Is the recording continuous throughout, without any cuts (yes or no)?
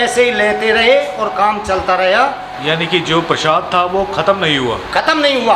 no